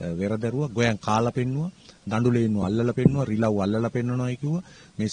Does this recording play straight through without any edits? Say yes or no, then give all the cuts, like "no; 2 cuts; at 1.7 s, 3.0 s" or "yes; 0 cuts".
yes; 0 cuts